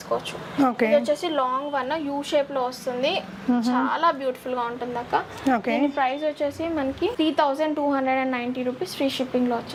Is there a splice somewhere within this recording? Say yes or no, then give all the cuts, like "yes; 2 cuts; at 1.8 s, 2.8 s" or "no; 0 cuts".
no; 0 cuts